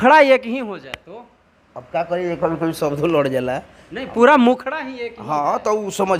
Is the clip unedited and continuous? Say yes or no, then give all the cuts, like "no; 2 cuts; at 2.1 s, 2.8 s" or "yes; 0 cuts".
yes; 0 cuts